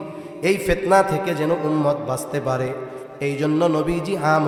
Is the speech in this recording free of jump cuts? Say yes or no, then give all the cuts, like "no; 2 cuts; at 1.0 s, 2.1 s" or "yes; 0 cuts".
yes; 0 cuts